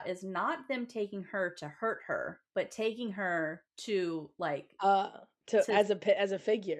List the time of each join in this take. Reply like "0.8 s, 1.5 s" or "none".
2.4 s, 3.7 s